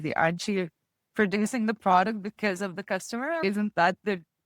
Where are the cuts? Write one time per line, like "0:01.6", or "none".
0:03.4

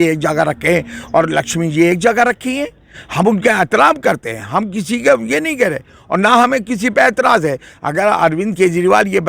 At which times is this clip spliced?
none

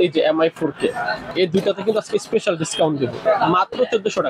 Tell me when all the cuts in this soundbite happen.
0:01.3
0:03.2

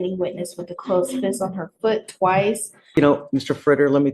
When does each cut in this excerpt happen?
0:02.9

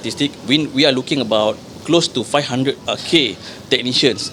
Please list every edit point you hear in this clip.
0:02.8

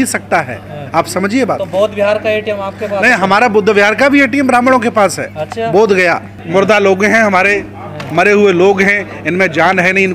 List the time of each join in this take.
0:06.4

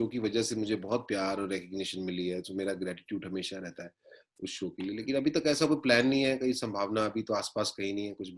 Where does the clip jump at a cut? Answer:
none

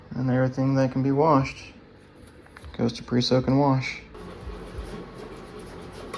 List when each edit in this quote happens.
0:04.2

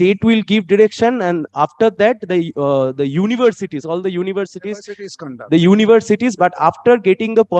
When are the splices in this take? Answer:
none

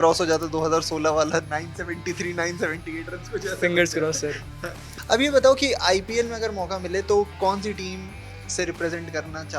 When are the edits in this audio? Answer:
0:04.8

